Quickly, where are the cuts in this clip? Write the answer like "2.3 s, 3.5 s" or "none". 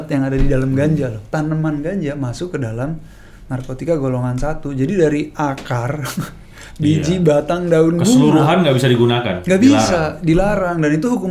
none